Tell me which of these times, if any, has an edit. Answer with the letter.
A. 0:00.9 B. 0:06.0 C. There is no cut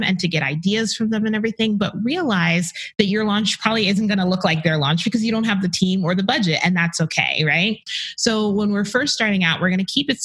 C